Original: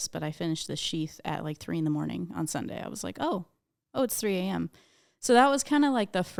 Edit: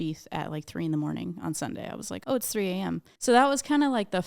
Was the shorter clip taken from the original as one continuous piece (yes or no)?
no